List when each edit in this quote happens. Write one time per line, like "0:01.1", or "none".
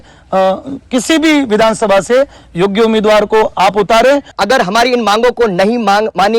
0:04.3